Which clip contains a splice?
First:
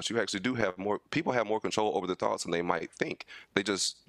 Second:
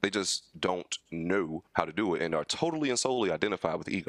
second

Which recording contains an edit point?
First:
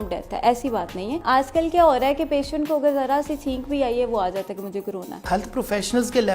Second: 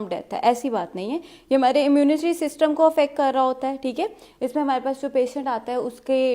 first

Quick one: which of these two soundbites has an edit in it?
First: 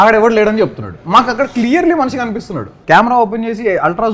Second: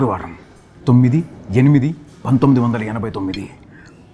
first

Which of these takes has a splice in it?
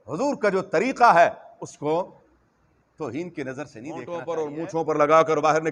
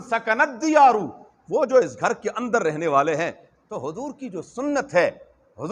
first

